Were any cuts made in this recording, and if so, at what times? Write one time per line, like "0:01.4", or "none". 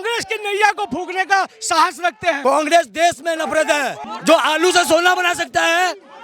0:02.4
0:04.1